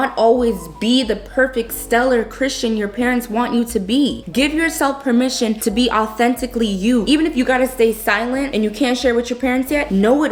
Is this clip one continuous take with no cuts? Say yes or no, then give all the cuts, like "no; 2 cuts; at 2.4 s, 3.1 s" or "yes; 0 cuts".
yes; 0 cuts